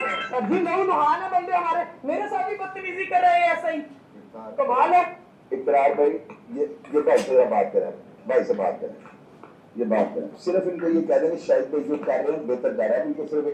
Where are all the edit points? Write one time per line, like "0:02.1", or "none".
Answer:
none